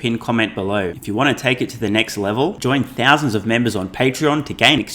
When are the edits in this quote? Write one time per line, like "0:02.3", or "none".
0:01.0